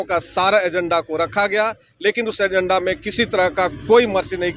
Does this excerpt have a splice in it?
no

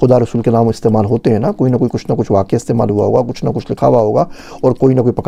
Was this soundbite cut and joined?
no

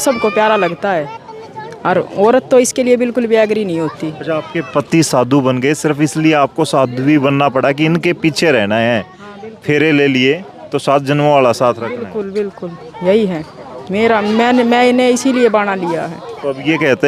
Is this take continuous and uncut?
yes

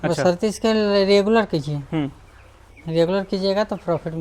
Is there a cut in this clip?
no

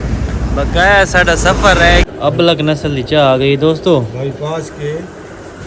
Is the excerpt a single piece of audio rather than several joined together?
no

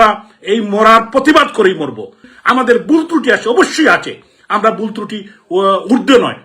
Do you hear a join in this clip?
yes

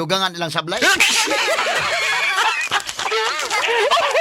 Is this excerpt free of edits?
no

